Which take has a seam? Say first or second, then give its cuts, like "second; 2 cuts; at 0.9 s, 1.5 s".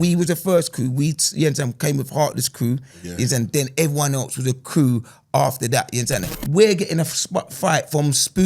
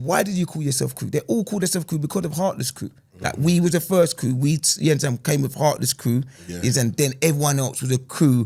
first; 1 cut; at 6.3 s